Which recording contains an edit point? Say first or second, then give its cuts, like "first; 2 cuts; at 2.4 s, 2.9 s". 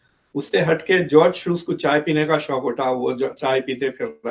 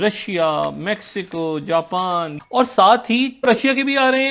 second; 2 cuts; at 2.3 s, 3.5 s